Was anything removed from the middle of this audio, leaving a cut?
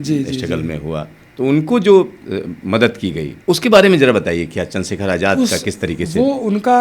yes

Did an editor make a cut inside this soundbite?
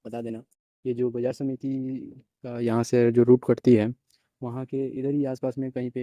no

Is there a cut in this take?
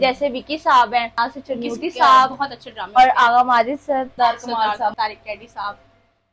yes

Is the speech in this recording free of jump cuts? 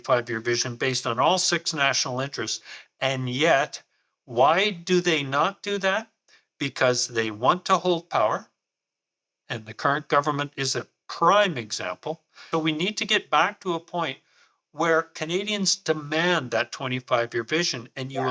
no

